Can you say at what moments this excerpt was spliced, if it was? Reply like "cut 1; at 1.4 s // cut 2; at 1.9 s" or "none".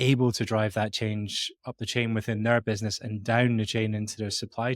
cut 1; at 1.6 s